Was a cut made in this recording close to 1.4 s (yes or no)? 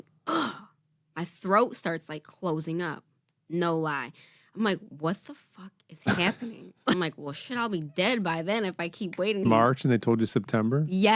no